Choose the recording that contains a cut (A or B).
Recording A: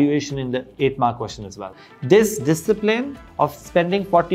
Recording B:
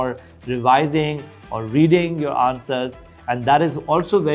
A